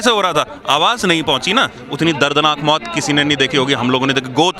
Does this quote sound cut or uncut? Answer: cut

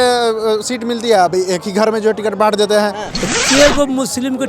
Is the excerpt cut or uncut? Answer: cut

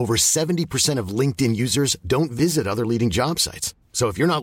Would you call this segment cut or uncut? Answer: uncut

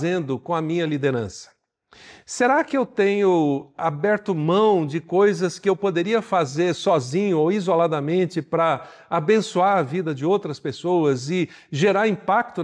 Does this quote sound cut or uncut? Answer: uncut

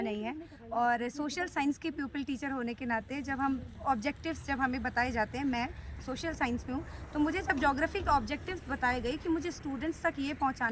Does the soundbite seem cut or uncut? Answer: uncut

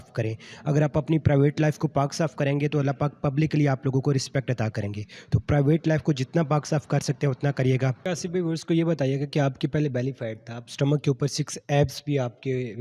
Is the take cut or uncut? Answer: cut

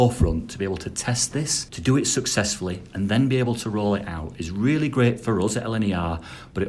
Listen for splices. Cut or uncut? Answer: cut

